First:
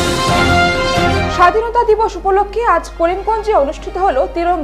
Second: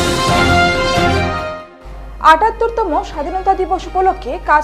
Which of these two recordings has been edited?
second; 1 cut; at 1.0 s

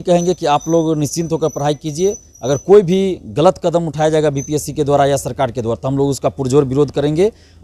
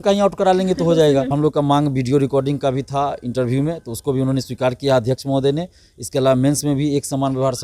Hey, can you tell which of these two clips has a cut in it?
second; 1 cut; at 1.3 s

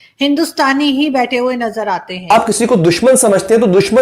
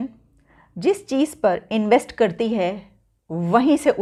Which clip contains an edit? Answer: first; 1 cut; at 2.3 s

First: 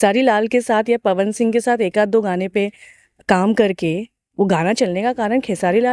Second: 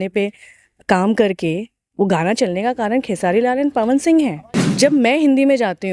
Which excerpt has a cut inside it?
second; 1 cut; at 4.5 s

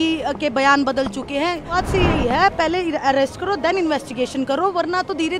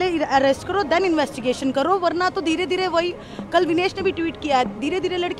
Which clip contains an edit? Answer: first; 1 cut; at 1.7 s

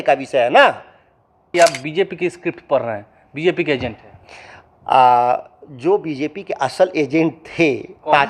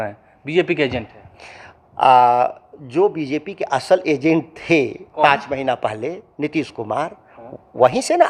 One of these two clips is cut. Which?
first; 1 cut; at 1.5 s

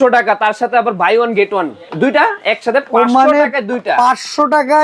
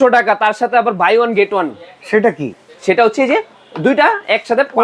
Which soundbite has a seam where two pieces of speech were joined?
first; 1 cut; at 1.8 s

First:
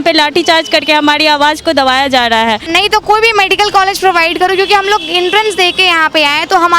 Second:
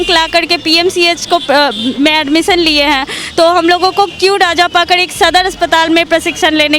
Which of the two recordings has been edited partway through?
first; 1 cut; at 2.7 s

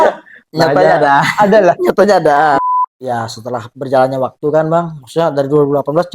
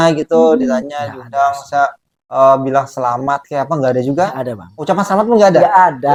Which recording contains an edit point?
first; 1 cut; at 2.6 s

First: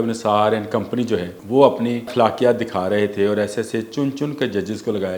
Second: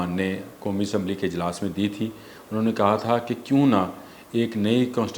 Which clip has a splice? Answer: first; 2 cuts; at 1.4 s, 2.1 s

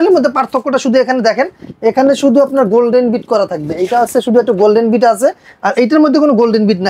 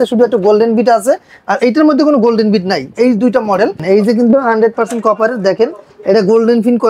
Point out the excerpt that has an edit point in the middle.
second; 1 cut; at 3.8 s

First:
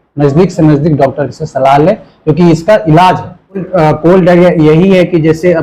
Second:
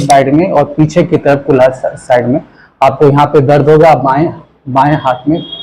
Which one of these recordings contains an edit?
first; 1 cut; at 3.7 s

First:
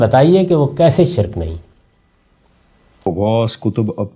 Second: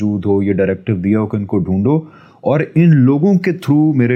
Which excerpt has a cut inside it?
first; 1 cut; at 3.0 s

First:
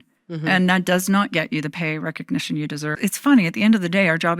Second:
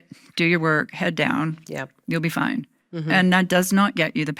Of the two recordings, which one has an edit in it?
first; 1 cut; at 2.9 s

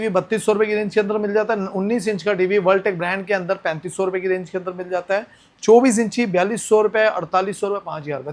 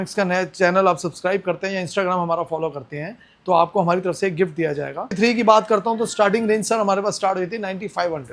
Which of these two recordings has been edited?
second; 1 cut; at 5.1 s

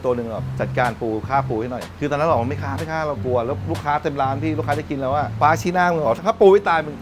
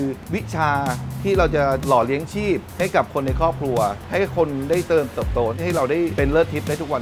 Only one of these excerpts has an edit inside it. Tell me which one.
second; 2 cuts; at 4.0 s, 6.1 s

